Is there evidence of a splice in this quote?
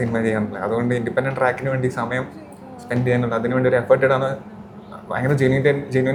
no; 0 cuts

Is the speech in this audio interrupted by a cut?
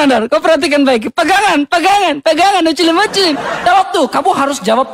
yes; 1 cut; at 3.6 s

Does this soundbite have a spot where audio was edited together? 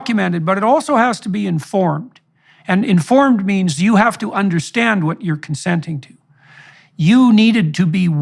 yes; 1 cut; at 6.7 s

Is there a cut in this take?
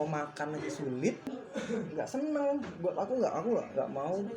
yes; 1 cut; at 1.4 s

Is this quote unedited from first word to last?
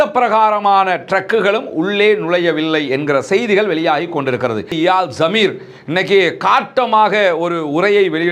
no; 1 cut; at 4.7 s

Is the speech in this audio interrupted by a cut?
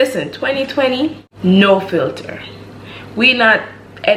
no; 0 cuts

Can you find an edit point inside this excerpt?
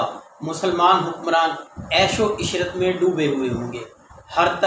no; 0 cuts

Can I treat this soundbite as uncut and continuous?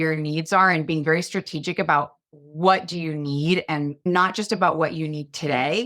no; 3 cuts; at 1.0 s, 2.3 s, 4.1 s

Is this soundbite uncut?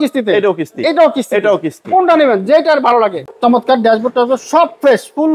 no; 1 cut; at 3.2 s

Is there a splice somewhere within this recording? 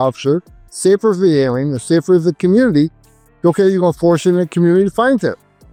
no; 0 cuts

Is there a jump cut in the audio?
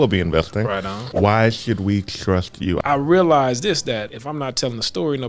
yes; 3 cuts; at 1.0 s, 2.8 s, 4.2 s

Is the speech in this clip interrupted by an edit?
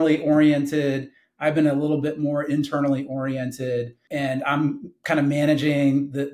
yes; 1 cut; at 4.0 s

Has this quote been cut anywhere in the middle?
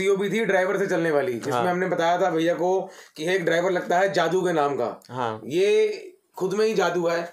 no; 0 cuts

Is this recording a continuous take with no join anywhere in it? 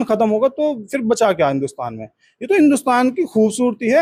yes; 0 cuts

